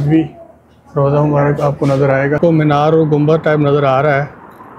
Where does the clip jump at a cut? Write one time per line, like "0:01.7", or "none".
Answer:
0:02.4